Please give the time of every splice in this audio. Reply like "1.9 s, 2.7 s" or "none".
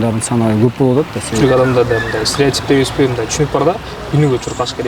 1.2 s